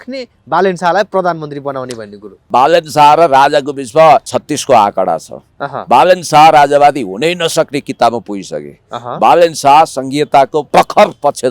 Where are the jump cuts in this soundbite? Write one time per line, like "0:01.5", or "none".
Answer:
0:02.5
0:04.3
0:10.7